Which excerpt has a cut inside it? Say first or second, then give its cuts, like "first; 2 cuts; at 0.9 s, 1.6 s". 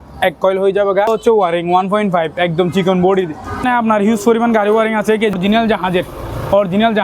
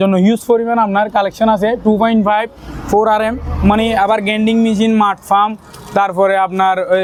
first; 3 cuts; at 1.1 s, 3.6 s, 5.4 s